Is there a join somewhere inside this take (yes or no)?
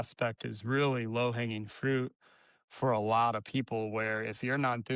no